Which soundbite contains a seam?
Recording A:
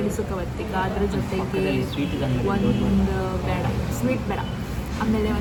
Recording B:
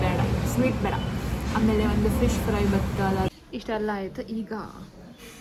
B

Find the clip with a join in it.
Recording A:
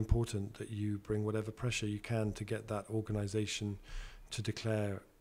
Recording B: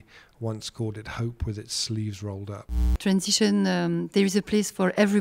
B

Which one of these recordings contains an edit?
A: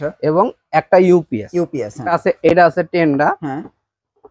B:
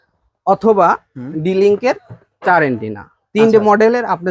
A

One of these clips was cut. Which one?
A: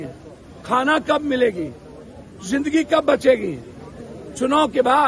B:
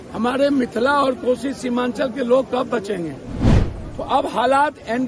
B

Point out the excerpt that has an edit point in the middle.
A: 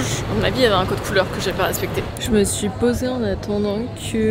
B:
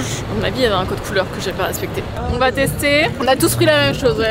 B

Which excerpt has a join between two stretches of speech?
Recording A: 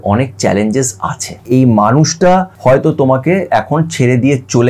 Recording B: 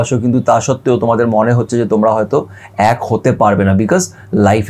A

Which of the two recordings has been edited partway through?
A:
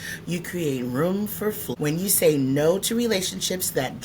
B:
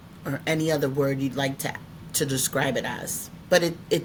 A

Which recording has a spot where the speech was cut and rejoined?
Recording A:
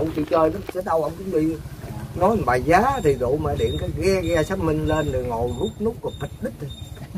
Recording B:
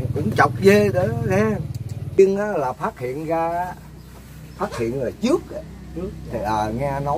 B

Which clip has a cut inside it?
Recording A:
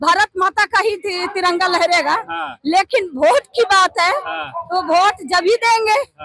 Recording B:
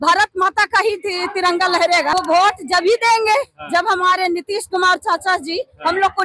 B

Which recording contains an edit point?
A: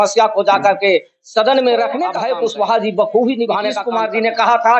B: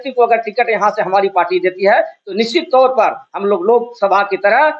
A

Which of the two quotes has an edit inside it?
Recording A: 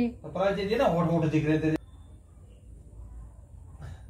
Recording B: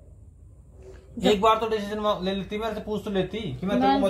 A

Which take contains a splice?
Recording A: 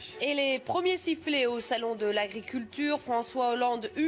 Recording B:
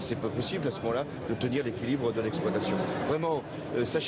B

